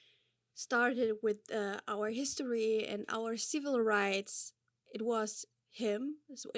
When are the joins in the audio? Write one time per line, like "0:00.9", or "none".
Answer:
none